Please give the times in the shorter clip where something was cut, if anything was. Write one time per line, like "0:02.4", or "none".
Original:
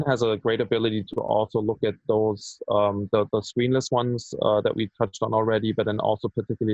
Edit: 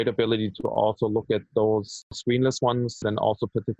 0:02.1
0:03.0